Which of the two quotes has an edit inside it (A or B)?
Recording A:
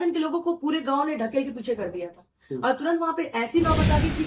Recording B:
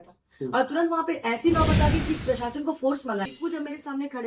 B